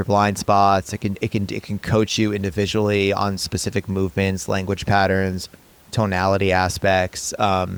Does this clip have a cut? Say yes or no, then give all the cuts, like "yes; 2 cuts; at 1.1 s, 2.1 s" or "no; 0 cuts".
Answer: no; 0 cuts